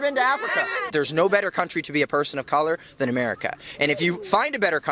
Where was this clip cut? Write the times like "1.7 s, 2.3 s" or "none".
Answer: 0.9 s